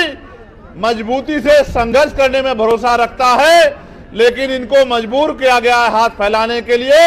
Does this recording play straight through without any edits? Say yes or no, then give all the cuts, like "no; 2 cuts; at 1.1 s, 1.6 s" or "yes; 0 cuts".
yes; 0 cuts